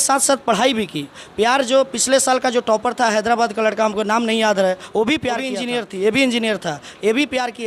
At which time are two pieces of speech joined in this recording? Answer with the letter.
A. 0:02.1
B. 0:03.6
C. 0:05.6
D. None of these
C